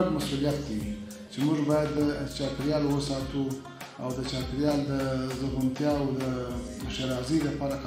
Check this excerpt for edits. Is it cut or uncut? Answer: uncut